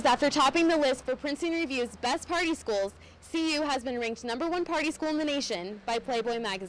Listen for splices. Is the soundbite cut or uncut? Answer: uncut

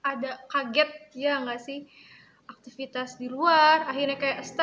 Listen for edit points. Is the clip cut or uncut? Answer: uncut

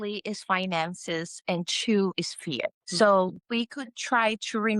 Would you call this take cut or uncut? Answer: cut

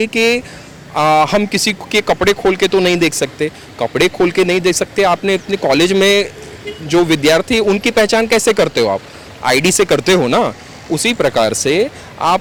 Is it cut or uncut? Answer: uncut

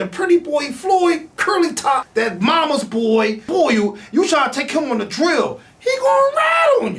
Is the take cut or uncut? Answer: cut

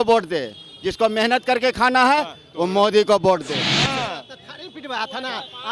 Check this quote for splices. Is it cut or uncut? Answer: cut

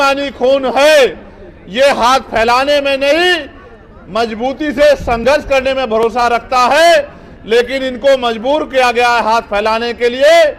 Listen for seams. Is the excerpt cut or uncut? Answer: uncut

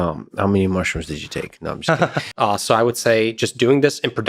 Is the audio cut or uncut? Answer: cut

